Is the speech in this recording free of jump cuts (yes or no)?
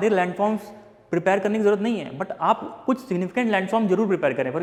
yes